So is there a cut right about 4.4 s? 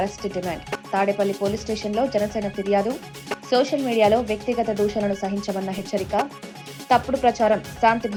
no; 0 cuts

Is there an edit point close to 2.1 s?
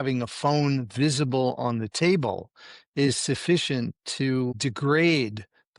no; 1 cut; at 4.6 s

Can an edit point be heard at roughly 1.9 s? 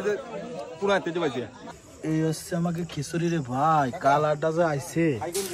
yes; 1 cut; at 1.9 s

